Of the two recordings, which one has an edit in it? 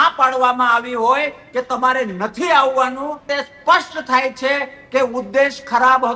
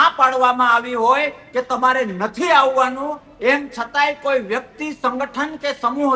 first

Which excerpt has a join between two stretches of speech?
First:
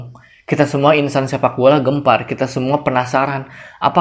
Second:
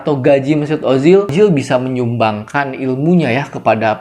second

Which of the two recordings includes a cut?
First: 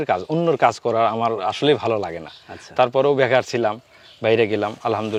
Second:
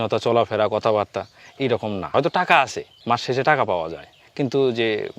second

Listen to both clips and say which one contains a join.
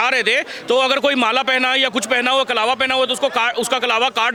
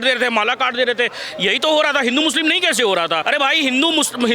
second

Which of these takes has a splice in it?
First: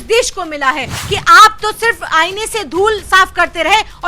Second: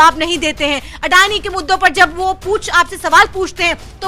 first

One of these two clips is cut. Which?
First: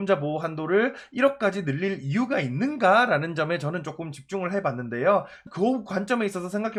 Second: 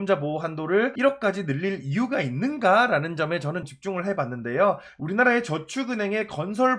second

